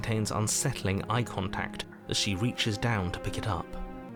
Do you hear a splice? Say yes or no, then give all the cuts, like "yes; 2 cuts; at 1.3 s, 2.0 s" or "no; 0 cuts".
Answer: no; 0 cuts